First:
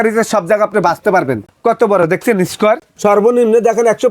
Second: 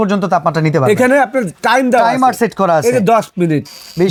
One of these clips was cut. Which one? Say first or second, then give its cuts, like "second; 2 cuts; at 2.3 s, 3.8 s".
first; 2 cuts; at 1.4 s, 2.9 s